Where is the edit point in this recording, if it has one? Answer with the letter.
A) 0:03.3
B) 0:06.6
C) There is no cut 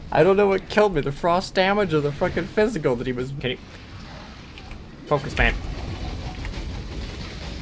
A